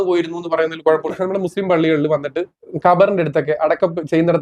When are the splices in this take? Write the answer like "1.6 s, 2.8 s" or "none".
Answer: 1.1 s, 2.6 s